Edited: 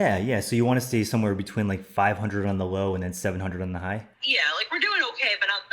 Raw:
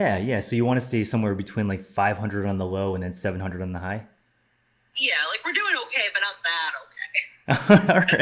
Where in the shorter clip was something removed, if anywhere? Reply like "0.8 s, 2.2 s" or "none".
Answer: 4.2 s